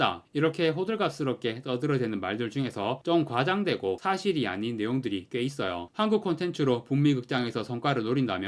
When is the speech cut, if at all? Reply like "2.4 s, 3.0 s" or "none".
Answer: 5.9 s